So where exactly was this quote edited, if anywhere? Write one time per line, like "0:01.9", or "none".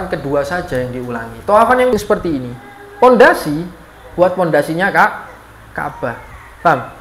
0:01.9